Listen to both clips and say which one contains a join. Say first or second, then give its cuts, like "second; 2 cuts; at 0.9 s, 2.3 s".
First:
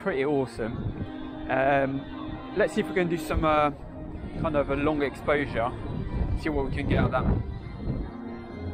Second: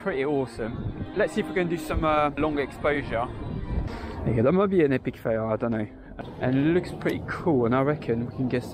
second; 4 cuts; at 1.0 s, 2.4 s, 3.9 s, 6.1 s